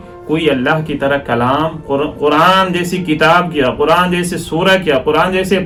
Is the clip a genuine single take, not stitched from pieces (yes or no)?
yes